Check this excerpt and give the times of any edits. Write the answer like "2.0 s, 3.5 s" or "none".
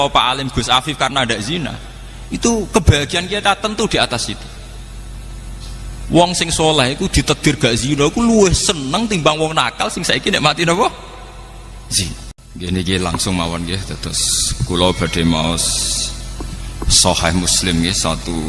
12.4 s